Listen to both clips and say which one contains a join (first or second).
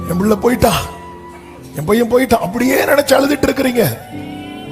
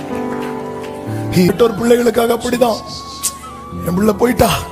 second